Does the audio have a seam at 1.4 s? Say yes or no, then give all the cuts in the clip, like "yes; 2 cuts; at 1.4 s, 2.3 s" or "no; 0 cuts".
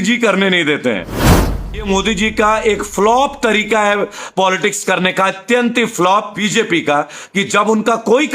yes; 2 cuts; at 1.4 s, 6.4 s